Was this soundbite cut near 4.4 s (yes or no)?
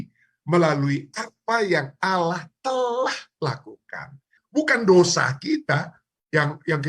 yes